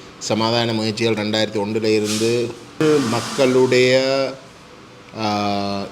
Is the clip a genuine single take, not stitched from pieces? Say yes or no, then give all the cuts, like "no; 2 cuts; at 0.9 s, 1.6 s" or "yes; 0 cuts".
no; 1 cut; at 2.8 s